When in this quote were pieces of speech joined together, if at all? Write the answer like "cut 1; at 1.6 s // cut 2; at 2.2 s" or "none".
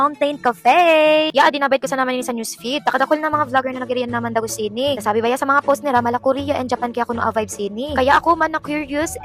none